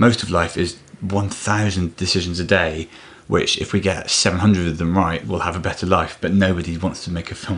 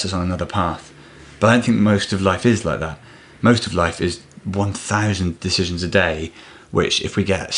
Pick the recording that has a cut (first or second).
first